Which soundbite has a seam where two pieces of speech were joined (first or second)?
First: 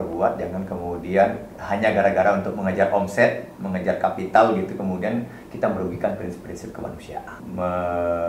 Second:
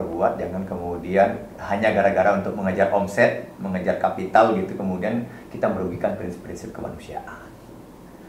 first